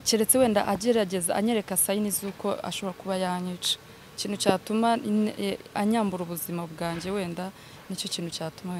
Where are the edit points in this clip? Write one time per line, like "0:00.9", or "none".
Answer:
none